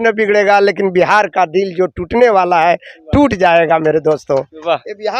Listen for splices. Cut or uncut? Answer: uncut